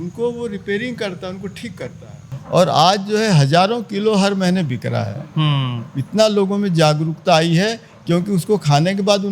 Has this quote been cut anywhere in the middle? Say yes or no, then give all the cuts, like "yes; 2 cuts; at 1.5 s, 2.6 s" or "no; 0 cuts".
yes; 1 cut; at 2.3 s